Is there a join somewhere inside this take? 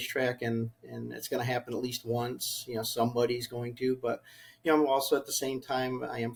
no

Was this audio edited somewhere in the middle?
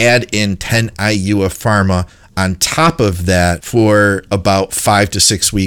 yes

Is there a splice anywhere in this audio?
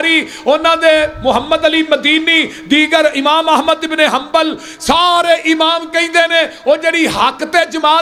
no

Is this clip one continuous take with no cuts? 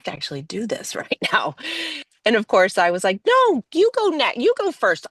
yes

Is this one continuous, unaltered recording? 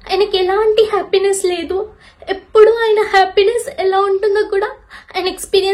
yes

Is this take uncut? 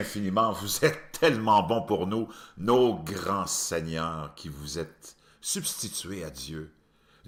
yes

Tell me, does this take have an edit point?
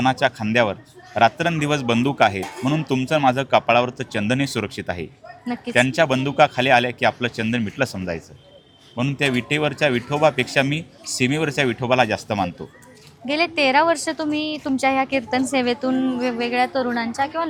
no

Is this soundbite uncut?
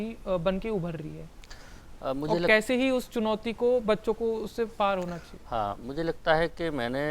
yes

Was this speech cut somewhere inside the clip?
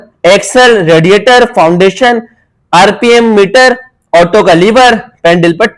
no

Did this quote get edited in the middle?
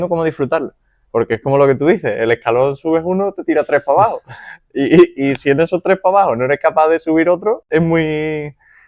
yes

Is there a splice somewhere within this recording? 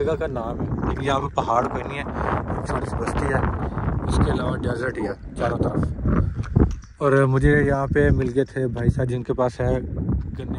no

